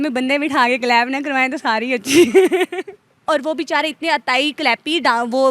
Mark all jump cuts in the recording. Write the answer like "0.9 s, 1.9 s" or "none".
3.3 s